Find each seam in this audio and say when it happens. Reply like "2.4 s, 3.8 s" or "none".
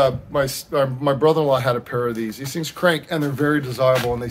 none